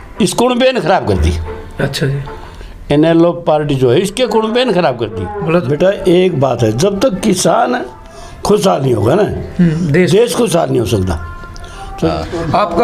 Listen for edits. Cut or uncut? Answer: cut